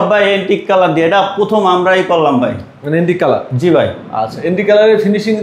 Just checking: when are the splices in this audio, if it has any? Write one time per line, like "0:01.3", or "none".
none